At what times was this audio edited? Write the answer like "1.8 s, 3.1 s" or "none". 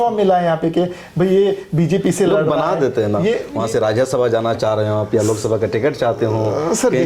3.5 s